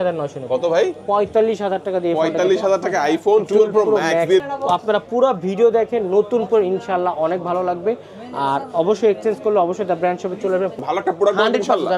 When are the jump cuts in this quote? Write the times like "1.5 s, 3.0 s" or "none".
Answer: 4.4 s, 10.8 s